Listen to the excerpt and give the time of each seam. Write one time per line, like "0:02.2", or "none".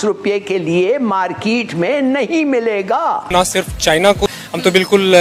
0:03.3
0:04.3